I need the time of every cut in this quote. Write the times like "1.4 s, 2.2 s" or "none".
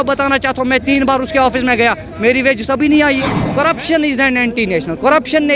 3.4 s